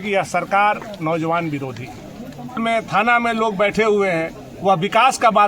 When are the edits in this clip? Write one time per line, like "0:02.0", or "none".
0:02.6